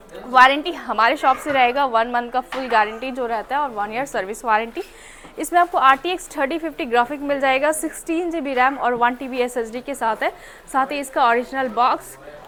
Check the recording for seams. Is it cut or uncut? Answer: uncut